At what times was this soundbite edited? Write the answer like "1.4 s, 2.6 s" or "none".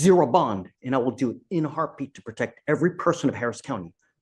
none